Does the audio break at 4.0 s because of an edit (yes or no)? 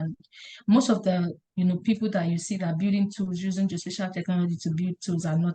no